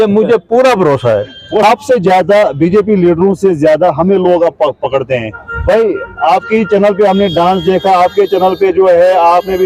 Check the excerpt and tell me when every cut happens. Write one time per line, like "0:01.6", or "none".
0:01.6